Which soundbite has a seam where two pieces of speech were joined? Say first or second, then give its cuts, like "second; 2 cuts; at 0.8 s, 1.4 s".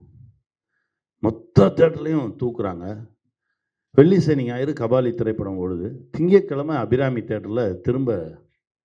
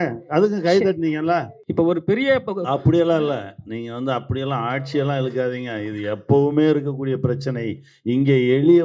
second; 1 cut; at 1.6 s